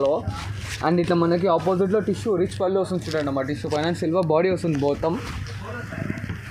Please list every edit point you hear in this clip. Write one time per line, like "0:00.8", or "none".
none